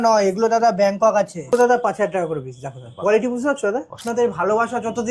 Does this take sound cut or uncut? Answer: cut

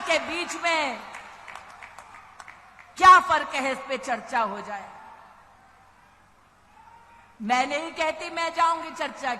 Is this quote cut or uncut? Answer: uncut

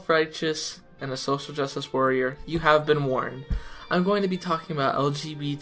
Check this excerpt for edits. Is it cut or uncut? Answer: cut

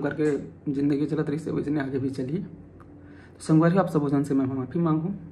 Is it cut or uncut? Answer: uncut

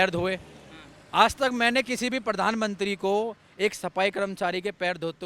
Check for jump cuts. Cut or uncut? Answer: uncut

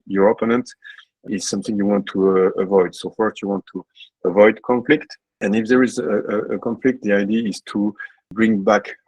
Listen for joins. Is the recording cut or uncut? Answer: cut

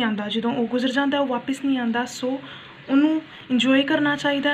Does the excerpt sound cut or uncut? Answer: uncut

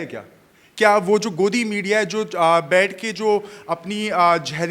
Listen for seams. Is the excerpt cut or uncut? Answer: uncut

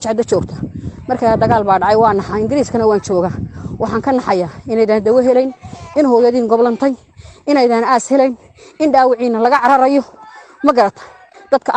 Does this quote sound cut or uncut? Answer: uncut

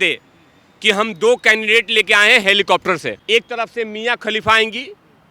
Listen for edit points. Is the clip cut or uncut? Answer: cut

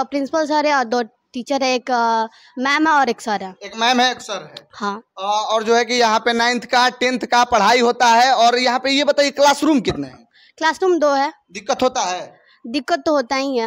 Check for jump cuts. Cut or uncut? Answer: uncut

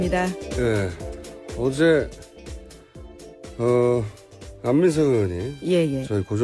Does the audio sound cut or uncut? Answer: cut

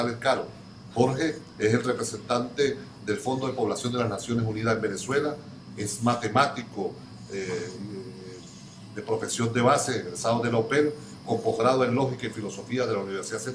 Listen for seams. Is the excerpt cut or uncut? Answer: cut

